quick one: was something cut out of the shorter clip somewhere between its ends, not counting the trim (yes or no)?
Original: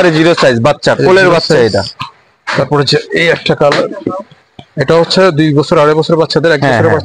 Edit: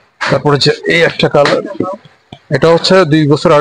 no